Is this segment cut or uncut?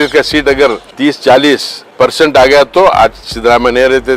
cut